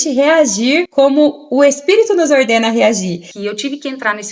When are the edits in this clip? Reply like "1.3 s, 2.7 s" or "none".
0.9 s, 3.3 s

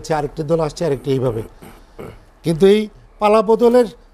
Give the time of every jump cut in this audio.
none

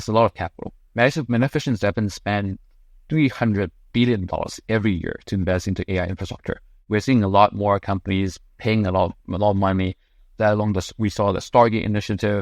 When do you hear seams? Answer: 6.7 s

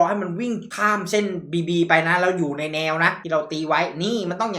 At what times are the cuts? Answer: 3.2 s

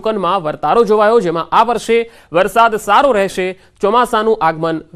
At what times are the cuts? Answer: none

